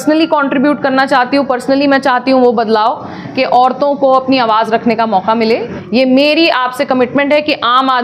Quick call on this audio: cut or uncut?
cut